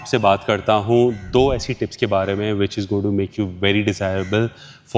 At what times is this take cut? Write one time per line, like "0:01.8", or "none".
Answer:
none